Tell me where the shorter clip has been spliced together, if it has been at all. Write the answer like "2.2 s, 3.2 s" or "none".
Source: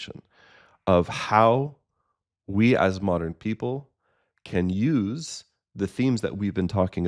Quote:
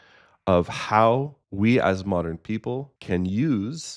1.4 s, 2.9 s